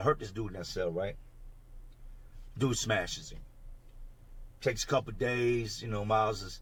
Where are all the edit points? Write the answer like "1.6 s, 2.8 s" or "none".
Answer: none